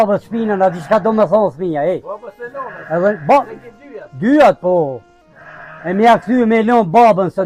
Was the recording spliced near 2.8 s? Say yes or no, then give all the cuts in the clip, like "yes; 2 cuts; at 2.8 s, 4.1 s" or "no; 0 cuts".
no; 0 cuts